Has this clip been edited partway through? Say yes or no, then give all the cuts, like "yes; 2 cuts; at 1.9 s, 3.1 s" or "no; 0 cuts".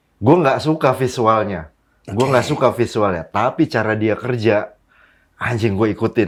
no; 0 cuts